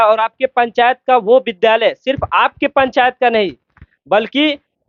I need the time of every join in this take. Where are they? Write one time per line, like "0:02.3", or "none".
none